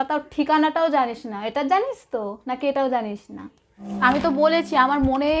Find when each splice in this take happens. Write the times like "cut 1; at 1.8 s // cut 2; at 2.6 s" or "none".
cut 1; at 3.8 s